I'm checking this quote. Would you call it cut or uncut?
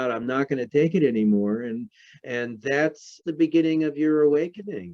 cut